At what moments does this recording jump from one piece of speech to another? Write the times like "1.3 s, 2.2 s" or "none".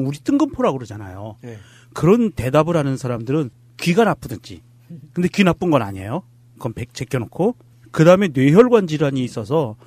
4.2 s